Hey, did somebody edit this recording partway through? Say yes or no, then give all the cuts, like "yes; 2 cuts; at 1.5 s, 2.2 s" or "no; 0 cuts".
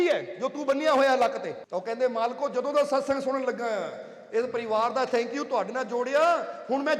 yes; 1 cut; at 1.6 s